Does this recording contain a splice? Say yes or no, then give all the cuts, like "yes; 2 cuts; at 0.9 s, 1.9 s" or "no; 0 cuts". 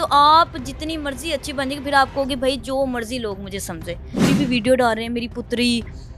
yes; 1 cut; at 4.2 s